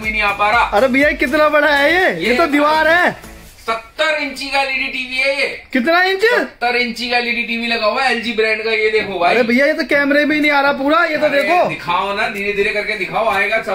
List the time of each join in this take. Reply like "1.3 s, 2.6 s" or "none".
none